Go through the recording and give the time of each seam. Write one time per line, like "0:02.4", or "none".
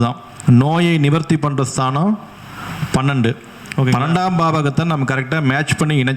0:03.9